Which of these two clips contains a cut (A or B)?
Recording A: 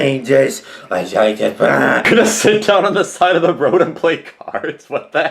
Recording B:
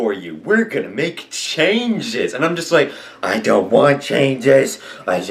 A